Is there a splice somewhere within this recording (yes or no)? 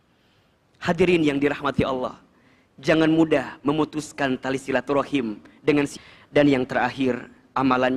yes